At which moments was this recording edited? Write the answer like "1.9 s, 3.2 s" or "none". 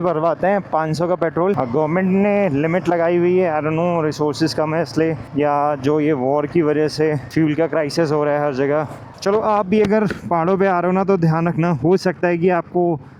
1.6 s, 5.2 s